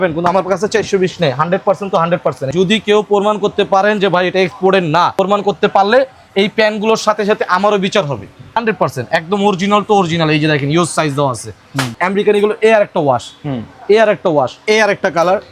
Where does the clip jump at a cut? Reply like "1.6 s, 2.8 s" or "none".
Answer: 2.5 s, 5.2 s, 8.6 s, 11.9 s, 14.6 s